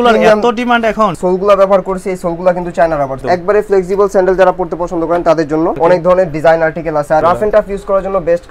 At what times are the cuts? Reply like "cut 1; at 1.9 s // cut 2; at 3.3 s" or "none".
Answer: cut 1; at 1.2 s // cut 2; at 3.2 s // cut 3; at 5.8 s // cut 4; at 7.2 s